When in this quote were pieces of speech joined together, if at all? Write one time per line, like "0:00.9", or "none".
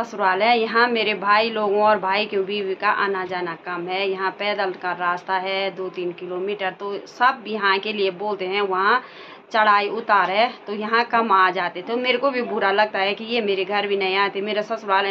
none